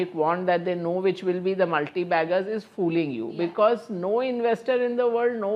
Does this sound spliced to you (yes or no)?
no